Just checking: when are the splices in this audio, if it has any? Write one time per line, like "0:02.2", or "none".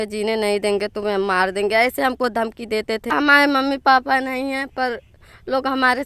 0:03.1